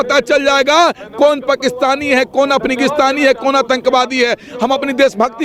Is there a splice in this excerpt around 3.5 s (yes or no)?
no